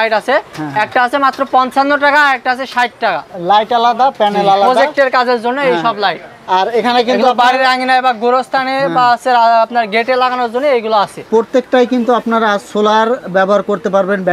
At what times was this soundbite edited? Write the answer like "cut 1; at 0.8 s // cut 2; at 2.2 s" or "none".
cut 1; at 3.3 s // cut 2; at 11.2 s